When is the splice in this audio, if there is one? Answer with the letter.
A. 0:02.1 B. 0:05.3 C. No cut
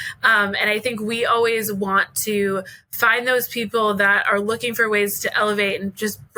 C